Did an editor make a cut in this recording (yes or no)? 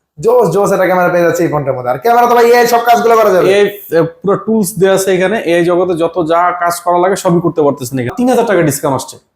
yes